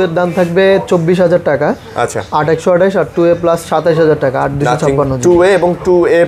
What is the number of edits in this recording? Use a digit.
0